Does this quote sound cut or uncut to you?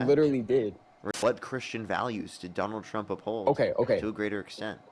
cut